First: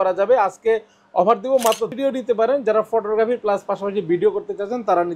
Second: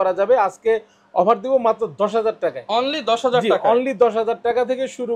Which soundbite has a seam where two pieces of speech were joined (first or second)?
first